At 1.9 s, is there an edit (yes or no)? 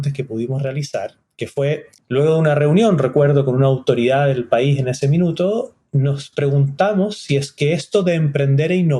yes